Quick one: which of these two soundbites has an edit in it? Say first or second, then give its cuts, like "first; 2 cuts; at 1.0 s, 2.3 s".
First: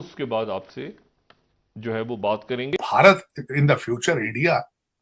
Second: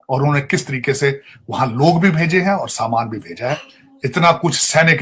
first; 1 cut; at 2.7 s